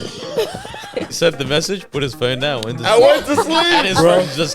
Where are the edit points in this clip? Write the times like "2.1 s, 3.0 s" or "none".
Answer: 1.1 s